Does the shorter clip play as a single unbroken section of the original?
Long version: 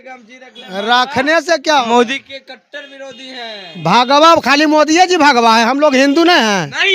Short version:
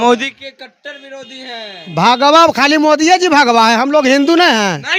yes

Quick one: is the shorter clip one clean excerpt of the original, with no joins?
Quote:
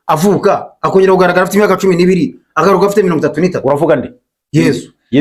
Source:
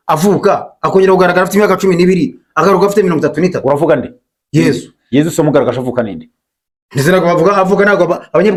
yes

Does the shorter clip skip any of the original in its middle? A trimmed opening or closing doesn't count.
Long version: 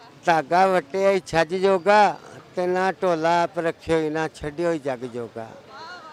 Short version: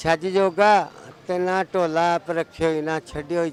no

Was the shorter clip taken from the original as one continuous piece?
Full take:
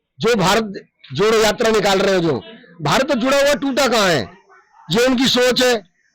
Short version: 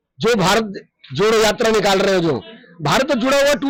yes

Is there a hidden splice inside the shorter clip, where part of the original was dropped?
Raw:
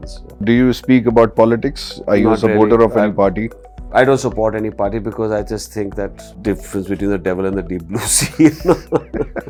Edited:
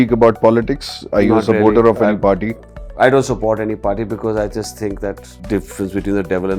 no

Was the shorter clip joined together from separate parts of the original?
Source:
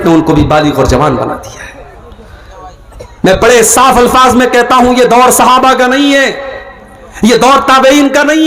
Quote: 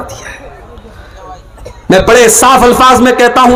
no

